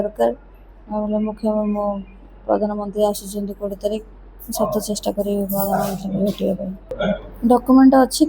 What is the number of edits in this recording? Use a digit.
1